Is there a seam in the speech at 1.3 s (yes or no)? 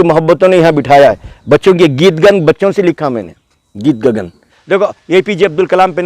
no